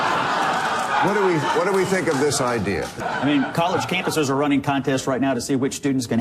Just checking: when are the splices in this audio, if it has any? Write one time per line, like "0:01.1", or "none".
0:03.0